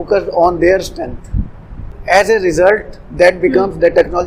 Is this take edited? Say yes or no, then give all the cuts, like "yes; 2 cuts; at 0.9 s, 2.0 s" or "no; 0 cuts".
yes; 1 cut; at 1.9 s